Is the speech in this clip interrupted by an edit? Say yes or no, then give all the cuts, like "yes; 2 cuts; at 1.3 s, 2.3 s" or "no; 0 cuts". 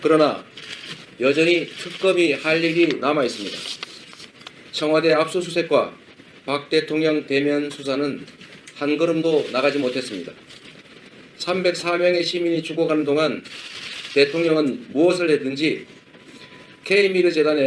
yes; 1 cut; at 5.7 s